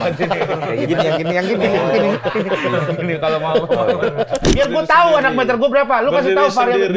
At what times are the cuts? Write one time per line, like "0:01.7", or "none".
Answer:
0:04.5

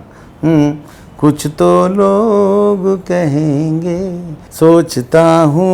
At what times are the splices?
0:04.4

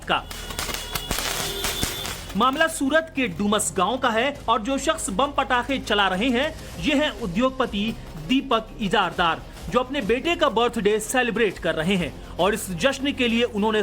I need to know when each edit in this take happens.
0:09.2

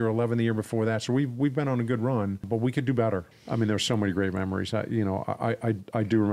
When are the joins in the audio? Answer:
0:02.4
0:03.3

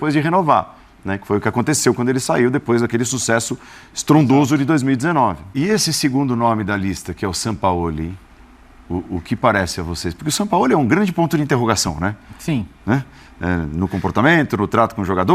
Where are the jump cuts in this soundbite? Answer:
0:05.5

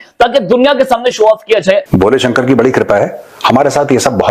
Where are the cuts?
0:01.9

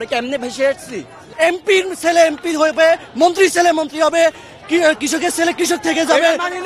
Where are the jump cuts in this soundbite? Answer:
0:01.2

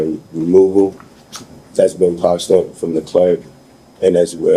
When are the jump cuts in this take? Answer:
none

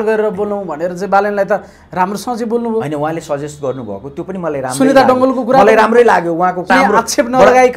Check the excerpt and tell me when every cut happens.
0:06.7

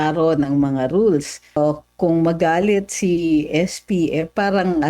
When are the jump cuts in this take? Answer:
0:01.6

